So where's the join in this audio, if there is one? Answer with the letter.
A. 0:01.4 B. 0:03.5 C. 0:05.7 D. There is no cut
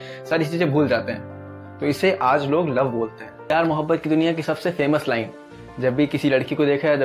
B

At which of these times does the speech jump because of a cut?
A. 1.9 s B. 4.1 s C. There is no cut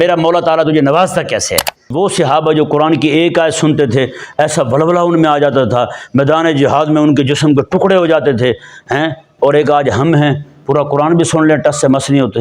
A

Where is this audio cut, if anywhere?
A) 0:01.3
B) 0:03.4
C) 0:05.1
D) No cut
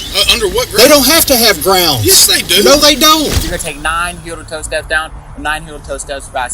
B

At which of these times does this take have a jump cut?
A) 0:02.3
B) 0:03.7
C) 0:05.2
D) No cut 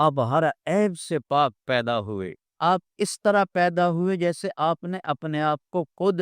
A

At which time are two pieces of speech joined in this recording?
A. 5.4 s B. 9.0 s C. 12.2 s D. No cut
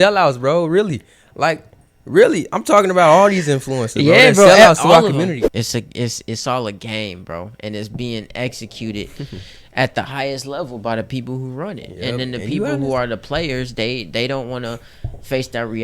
A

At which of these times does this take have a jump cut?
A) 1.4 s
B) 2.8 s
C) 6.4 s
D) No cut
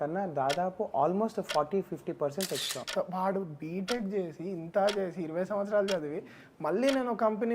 B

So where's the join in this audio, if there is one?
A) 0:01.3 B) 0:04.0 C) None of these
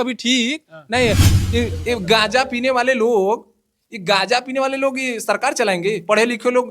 A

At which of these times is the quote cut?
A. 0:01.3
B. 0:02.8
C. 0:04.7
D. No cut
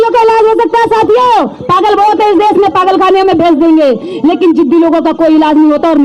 D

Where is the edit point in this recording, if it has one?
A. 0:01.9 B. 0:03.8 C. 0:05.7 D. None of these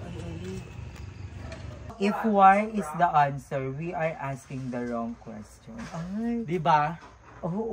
A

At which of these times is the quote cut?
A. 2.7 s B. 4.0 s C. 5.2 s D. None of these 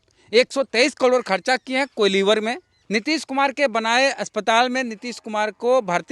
A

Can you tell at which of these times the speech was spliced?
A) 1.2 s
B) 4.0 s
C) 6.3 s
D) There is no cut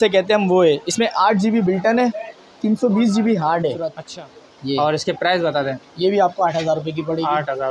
B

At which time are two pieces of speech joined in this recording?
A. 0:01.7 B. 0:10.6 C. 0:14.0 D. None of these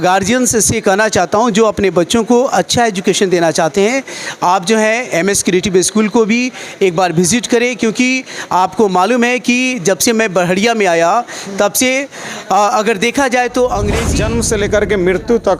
C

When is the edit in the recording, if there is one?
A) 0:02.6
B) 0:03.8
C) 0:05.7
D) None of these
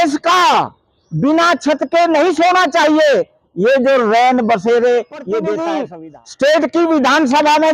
C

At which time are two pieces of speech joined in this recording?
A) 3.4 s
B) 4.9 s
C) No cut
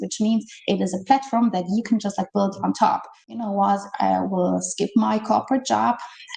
A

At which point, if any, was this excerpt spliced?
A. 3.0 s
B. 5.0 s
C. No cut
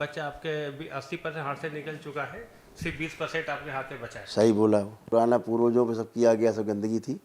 B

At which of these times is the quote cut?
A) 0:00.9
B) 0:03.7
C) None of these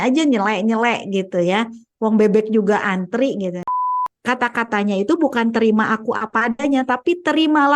B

